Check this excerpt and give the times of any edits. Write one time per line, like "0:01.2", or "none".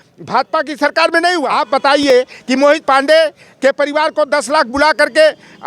0:01.4